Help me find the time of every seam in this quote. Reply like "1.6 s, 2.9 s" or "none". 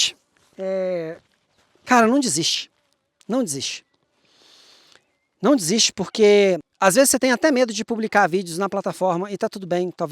6.7 s